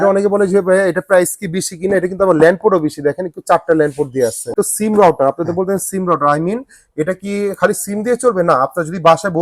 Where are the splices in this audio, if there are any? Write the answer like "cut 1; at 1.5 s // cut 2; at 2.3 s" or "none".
cut 1; at 4.5 s